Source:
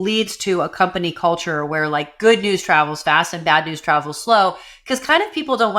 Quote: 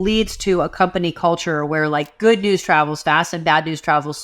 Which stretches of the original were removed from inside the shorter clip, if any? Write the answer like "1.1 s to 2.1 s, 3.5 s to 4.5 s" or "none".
none